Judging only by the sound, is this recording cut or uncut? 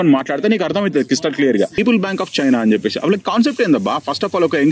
cut